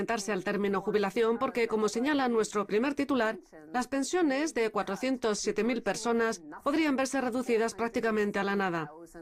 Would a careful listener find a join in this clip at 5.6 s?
yes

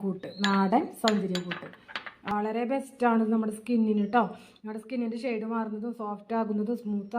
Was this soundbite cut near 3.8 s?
no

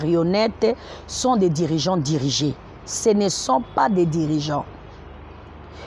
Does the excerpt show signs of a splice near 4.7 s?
no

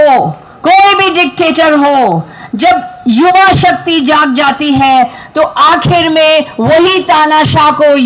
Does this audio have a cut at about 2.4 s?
no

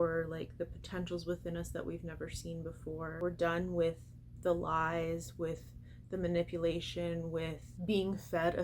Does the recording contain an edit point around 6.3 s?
no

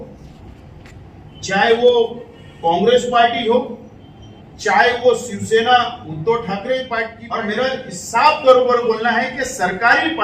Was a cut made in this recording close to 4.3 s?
no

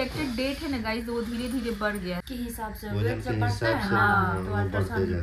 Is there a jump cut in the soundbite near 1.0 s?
no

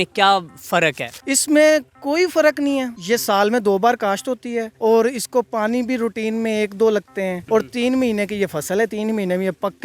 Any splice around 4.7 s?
yes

